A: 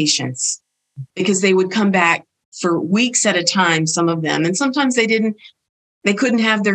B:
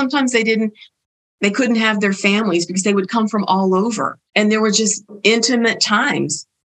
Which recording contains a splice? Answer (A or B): B